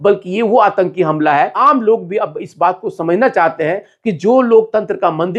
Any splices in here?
no; 0 cuts

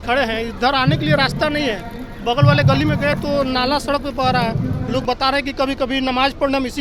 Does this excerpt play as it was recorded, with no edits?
yes; 0 cuts

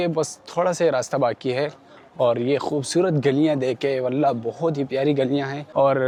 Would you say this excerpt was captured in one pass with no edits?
yes; 0 cuts

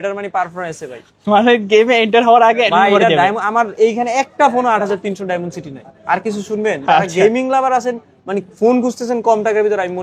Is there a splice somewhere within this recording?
no; 0 cuts

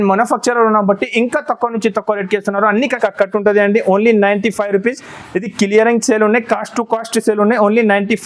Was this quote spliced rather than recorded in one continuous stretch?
yes; 1 cut; at 3.0 s

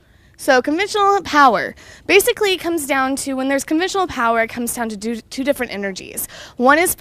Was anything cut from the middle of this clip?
no; 0 cuts

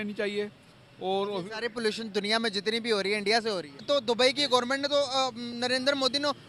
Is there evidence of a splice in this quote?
yes; 1 cut; at 3.8 s

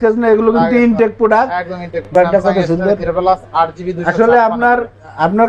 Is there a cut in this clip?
yes; 1 cut; at 2.1 s

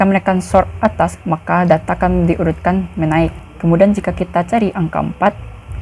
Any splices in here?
yes; 1 cut; at 3.4 s

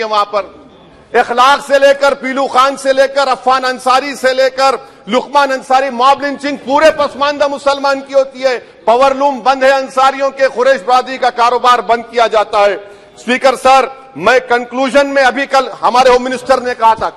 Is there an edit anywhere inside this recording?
no; 0 cuts

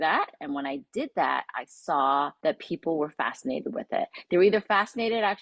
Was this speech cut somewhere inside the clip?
yes; 1 cut; at 2.3 s

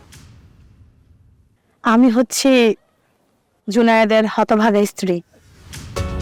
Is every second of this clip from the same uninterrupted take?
no; 1 cut; at 1.5 s

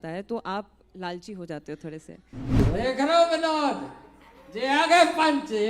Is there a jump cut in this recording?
yes; 1 cut; at 2.6 s

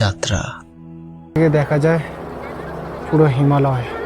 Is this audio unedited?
no; 1 cut; at 1.4 s

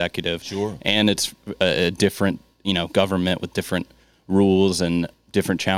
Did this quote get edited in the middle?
no; 0 cuts

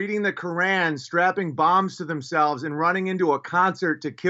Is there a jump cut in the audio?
no; 0 cuts

